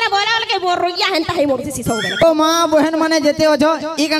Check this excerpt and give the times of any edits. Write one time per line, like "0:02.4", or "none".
0:02.2